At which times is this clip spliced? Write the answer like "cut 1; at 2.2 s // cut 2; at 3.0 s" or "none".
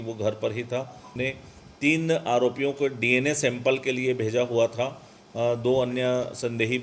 cut 1; at 1.1 s